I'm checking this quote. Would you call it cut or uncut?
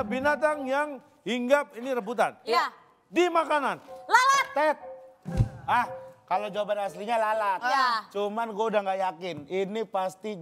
uncut